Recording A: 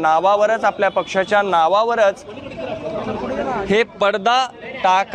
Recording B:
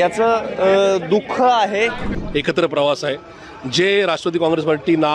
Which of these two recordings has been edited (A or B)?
B